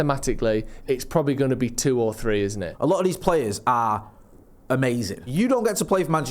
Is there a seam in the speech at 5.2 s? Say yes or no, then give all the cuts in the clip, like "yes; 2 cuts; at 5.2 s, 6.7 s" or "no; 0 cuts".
yes; 2 cuts; at 2.7 s, 5.2 s